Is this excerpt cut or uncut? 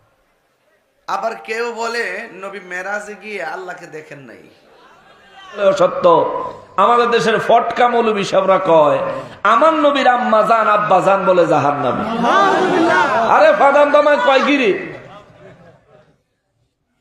cut